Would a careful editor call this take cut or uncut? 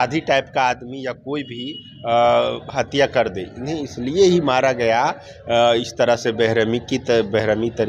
uncut